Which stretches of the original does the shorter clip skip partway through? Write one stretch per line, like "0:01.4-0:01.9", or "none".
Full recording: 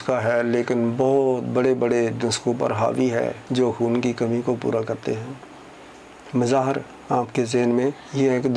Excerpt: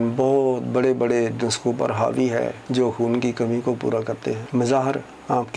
0:05.2-0:06.2